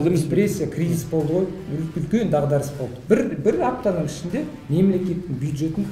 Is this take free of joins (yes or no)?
no